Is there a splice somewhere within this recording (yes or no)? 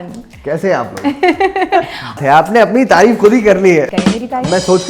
yes